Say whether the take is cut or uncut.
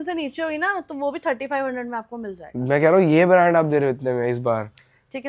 uncut